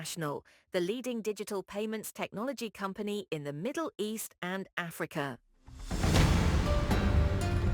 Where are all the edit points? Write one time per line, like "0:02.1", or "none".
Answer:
0:05.4